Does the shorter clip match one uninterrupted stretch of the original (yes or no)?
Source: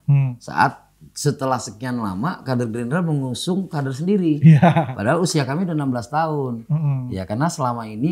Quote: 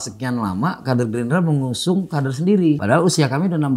no